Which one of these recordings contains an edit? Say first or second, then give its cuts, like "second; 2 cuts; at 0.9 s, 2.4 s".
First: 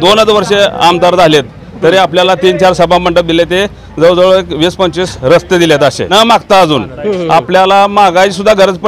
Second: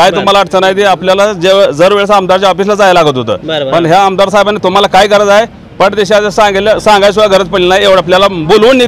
first; 2 cuts; at 5.1 s, 6.1 s